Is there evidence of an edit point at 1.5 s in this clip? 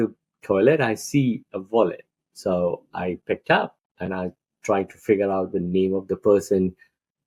no; 0 cuts

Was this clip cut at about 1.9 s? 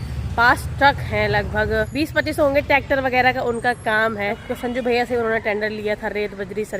yes; 2 cuts; at 1.9 s, 4.4 s

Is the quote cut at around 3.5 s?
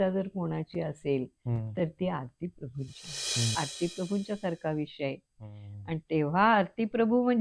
yes; 1 cut; at 3.5 s

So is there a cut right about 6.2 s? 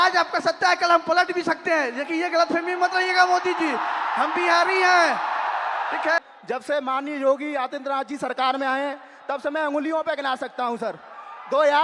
yes; 1 cut; at 6.2 s

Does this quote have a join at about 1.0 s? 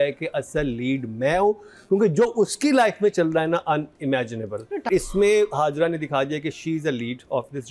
no; 1 cut; at 4.9 s

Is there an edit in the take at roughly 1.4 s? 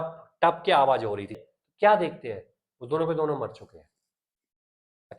yes; 1 cut; at 1.4 s

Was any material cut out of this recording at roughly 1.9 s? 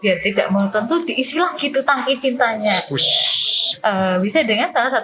no; 1 cut; at 3.7 s

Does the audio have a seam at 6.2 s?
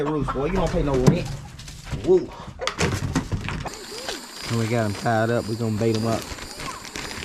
no; 1 cut; at 3.6 s

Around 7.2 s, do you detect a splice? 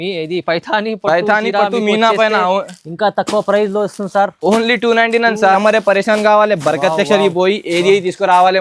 no; 1 cut; at 5.5 s

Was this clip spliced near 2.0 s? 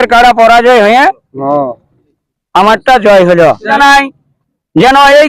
no; 1 cut; at 3.7 s

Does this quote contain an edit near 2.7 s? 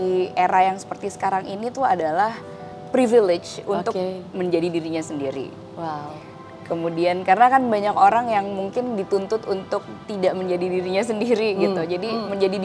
no; 0 cuts

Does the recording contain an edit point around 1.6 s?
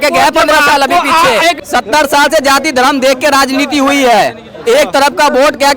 yes; 1 cut; at 1.6 s

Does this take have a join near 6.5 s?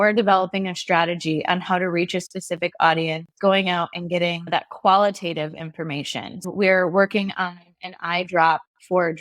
yes; 1 cut; at 6.5 s

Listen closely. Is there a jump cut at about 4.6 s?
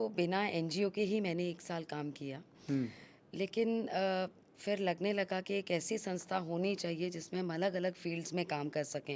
no; 0 cuts

